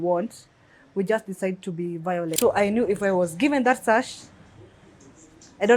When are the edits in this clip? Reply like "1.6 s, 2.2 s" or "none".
2.3 s